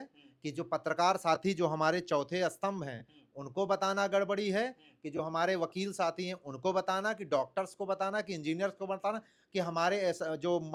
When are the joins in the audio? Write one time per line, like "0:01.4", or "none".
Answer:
none